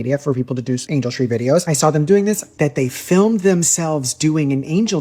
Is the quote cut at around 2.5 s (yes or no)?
yes